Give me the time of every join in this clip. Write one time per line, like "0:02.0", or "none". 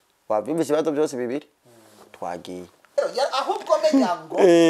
0:03.0